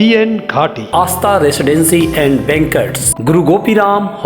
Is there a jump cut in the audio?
yes; 1 cut; at 3.0 s

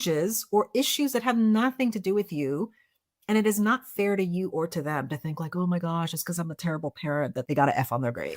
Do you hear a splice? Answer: yes; 1 cut; at 7.4 s

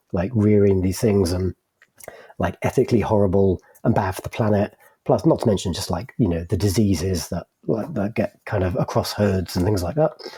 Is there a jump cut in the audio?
no; 0 cuts

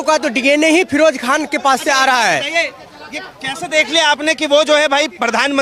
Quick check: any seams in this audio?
no; 0 cuts

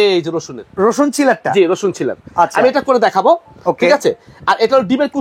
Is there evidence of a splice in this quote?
no; 0 cuts

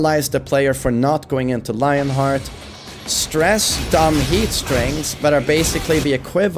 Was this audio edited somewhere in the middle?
no; 0 cuts

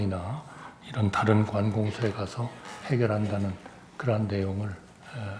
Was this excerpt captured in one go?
yes; 0 cuts

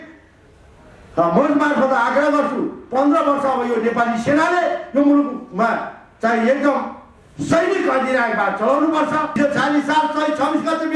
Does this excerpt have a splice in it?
yes; 1 cut; at 9.4 s

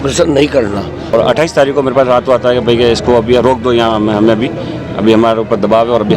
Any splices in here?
yes; 1 cut; at 1.1 s

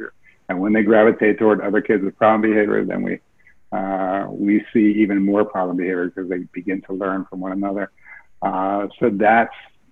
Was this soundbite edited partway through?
no; 0 cuts

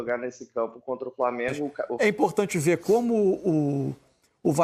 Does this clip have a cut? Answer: yes; 1 cut; at 1.9 s

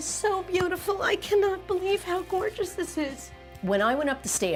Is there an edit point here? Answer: no; 0 cuts

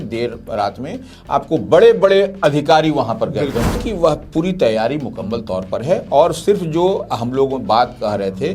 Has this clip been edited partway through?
yes; 1 cut; at 3.8 s

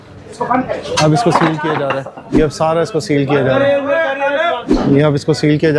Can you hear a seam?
yes; 2 cuts; at 2.2 s, 4.6 s

